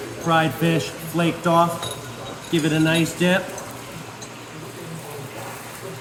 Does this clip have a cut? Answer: no; 0 cuts

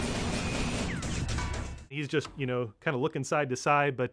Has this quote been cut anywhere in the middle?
yes; 1 cut; at 1.9 s

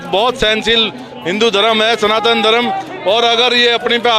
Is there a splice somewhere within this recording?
no; 0 cuts

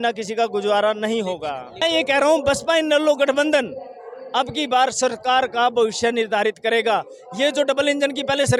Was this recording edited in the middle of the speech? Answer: yes; 1 cut; at 1.7 s

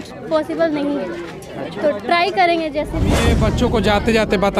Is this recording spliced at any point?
yes; 1 cut; at 3.3 s

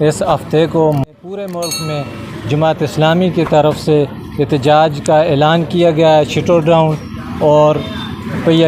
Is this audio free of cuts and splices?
no; 1 cut; at 1.0 s

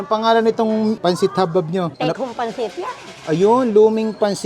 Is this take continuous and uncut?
no; 1 cut; at 1.0 s

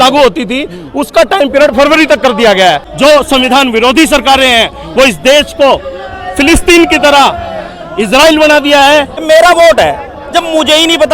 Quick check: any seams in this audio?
yes; 2 cuts; at 2.9 s, 9.1 s

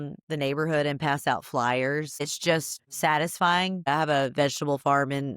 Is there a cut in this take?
yes; 2 cuts; at 2.4 s, 3.9 s

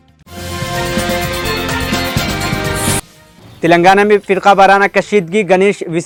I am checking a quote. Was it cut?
no; 0 cuts

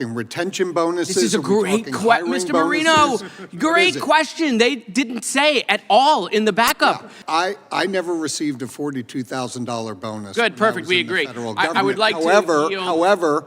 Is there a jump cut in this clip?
yes; 1 cut; at 7.1 s

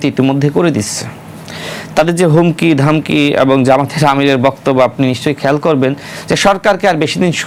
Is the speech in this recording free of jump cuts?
yes; 0 cuts

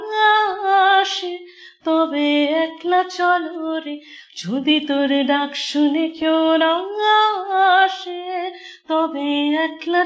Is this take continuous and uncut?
yes; 0 cuts

